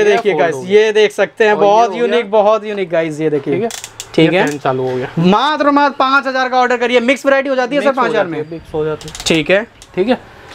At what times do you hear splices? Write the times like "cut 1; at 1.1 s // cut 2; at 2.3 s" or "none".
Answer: none